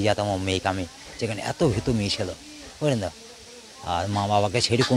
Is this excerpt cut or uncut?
uncut